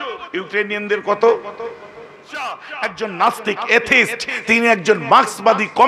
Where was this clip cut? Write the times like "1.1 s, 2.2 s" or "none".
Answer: 2.7 s